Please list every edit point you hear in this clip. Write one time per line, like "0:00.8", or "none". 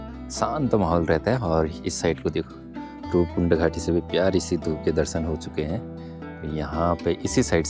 none